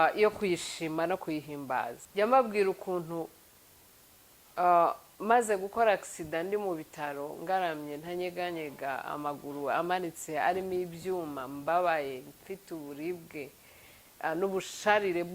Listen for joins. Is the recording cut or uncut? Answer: cut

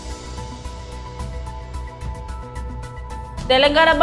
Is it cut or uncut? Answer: uncut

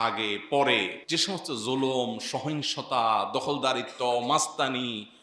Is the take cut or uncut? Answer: cut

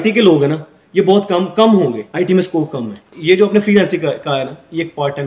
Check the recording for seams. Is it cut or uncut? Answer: cut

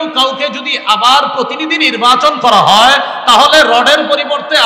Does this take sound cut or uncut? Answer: uncut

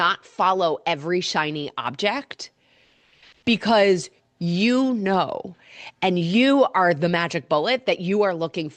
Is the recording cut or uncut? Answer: uncut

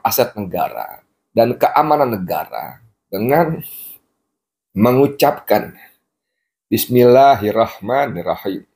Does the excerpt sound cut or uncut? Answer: uncut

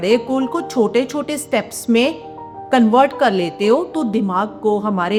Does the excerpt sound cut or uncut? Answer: uncut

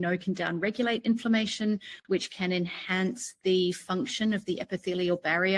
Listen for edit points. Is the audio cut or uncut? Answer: uncut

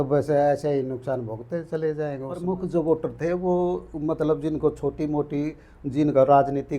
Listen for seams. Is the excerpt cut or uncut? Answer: cut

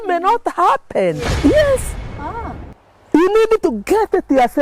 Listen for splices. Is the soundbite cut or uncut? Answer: cut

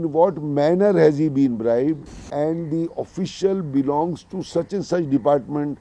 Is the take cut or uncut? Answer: cut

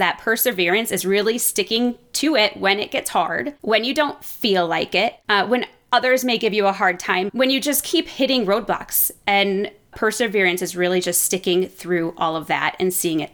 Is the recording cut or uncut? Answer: cut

